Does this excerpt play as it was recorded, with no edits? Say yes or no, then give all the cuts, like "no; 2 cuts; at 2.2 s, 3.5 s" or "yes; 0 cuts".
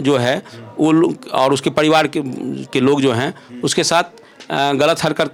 yes; 0 cuts